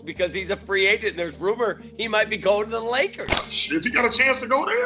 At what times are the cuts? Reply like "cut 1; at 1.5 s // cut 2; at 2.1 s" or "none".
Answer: cut 1; at 3.5 s